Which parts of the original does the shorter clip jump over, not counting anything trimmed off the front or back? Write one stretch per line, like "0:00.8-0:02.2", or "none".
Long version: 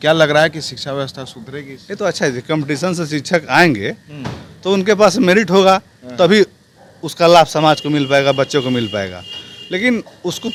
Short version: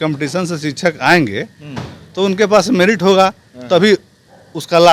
none